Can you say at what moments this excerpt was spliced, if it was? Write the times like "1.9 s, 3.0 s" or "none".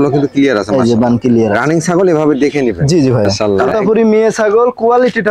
3.4 s